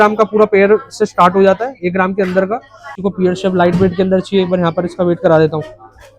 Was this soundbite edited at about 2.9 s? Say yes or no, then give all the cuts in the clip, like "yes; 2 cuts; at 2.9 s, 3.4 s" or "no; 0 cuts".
yes; 1 cut; at 2.9 s